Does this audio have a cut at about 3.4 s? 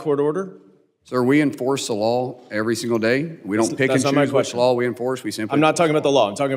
no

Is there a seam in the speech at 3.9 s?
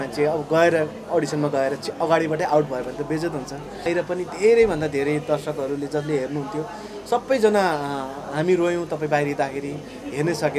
yes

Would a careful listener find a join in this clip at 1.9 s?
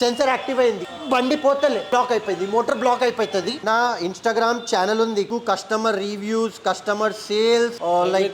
yes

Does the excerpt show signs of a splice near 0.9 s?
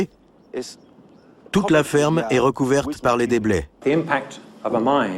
no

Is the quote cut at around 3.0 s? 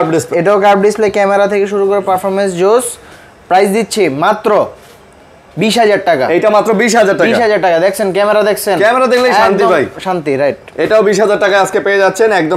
no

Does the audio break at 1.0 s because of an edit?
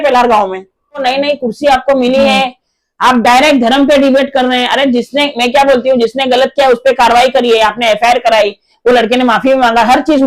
yes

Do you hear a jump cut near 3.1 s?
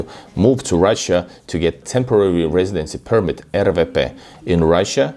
no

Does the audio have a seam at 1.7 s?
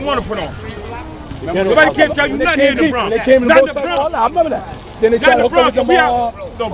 no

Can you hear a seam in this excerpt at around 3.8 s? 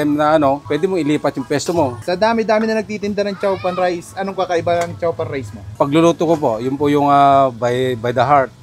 no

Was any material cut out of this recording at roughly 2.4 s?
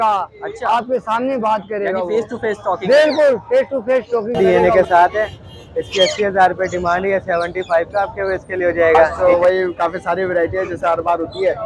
no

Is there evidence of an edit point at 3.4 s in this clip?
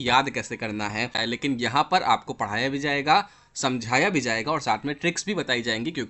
no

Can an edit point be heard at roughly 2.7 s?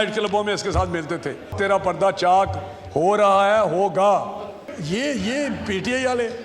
no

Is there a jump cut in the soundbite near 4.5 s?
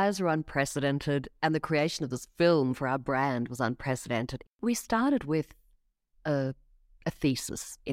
yes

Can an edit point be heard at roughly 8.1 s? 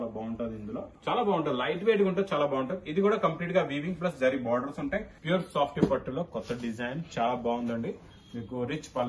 no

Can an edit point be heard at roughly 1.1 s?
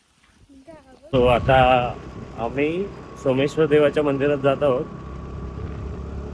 yes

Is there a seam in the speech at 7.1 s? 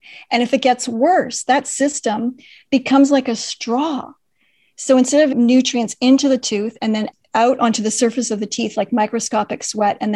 yes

